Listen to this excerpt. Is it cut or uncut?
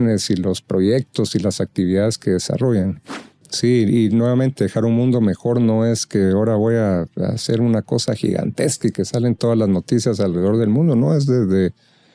cut